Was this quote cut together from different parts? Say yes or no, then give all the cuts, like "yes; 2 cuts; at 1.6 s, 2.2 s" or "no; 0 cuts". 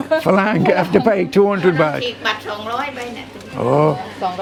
no; 0 cuts